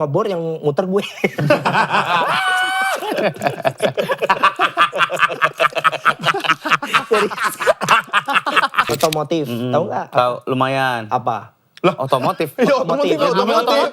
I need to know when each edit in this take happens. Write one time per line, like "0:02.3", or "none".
0:08.9